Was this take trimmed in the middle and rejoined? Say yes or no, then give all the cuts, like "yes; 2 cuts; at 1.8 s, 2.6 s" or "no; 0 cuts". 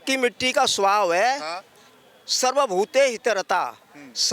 no; 0 cuts